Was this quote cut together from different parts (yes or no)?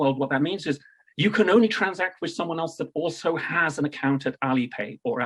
no